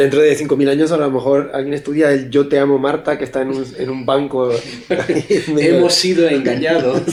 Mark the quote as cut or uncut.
uncut